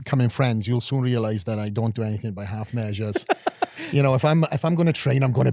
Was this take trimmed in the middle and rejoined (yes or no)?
no